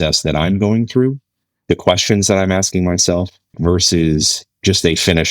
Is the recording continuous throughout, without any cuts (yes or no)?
no